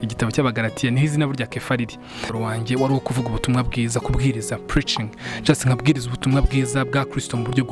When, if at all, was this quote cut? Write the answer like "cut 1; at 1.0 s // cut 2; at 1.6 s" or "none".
cut 1; at 2.3 s